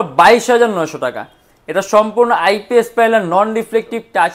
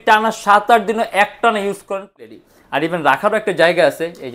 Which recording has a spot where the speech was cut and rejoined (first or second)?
second